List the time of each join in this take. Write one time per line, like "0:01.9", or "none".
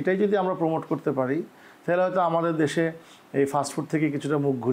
none

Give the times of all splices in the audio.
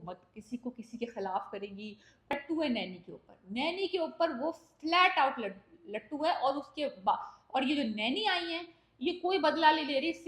0:02.3

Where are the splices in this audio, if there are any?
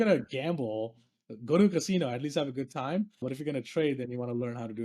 0:03.2

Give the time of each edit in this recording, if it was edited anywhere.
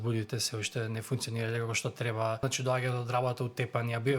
0:02.4

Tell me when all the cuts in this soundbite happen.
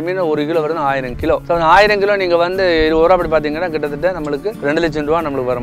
0:01.4
0:04.6

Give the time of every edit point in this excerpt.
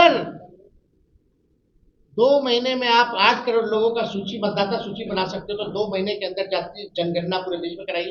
none

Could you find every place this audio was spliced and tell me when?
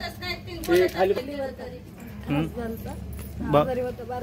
0:01.2

